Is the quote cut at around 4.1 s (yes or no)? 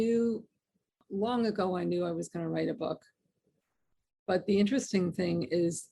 no